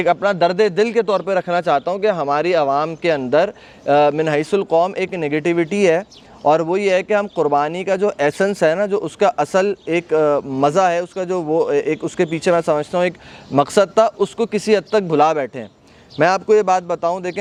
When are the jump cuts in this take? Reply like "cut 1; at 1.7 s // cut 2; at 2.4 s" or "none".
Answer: none